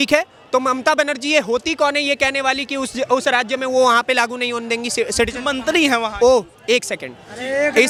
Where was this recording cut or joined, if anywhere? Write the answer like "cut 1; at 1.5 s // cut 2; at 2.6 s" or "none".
none